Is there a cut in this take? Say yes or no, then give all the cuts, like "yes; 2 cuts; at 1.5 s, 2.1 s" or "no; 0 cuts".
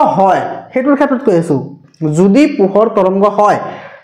no; 0 cuts